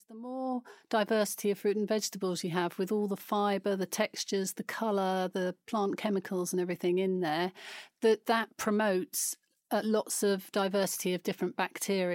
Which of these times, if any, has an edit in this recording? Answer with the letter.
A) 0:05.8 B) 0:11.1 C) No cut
C